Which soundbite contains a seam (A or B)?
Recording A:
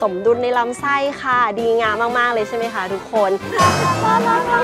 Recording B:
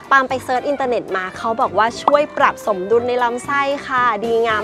A